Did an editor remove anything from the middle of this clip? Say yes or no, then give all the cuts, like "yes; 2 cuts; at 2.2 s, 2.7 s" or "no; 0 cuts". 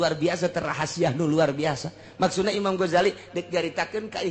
no; 0 cuts